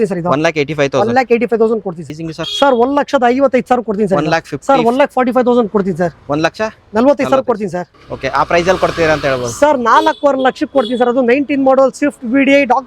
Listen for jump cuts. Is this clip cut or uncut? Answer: cut